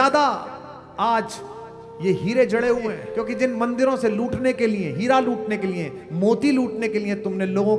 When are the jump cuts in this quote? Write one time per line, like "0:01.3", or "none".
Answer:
0:03.0

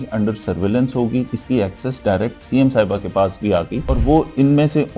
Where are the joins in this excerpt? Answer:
0:01.3
0:03.8

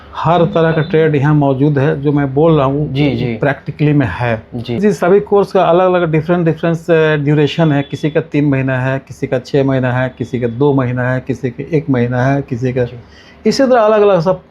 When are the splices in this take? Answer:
0:04.8

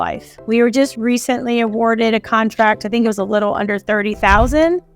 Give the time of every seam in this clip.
0:00.9

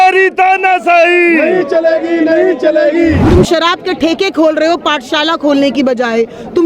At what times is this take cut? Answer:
0:03.2

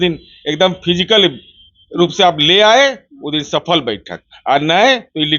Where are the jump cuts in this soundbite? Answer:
none

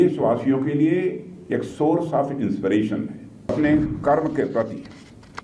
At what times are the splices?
0:03.5

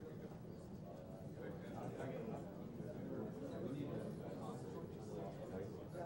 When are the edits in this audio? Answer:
0:03.9

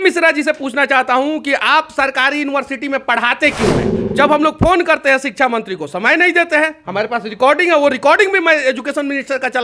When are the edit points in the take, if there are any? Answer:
0:04.0

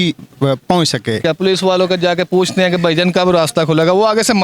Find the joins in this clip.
0:01.2

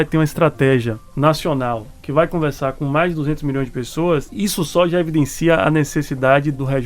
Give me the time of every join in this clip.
0:01.0
0:04.3

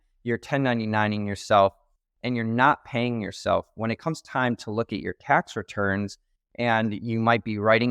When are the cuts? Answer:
none

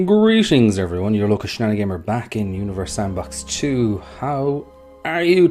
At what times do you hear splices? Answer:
0:02.7

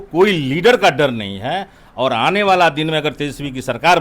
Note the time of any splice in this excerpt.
none

